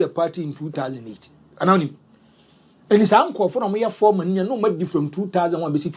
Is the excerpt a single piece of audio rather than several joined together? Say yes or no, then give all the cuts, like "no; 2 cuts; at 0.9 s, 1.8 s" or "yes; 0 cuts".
yes; 0 cuts